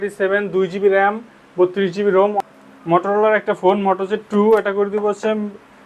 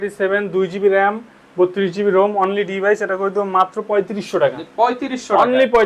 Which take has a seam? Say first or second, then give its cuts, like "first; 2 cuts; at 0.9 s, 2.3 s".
first; 1 cut; at 2.4 s